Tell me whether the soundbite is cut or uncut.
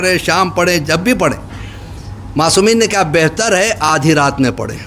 uncut